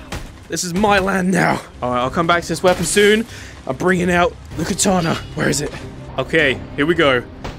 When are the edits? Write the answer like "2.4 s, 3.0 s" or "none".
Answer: none